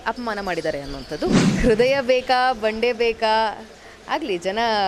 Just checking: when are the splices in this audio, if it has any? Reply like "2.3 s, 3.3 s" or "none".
1.4 s